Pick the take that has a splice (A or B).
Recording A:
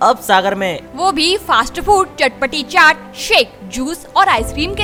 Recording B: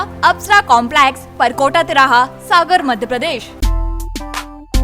B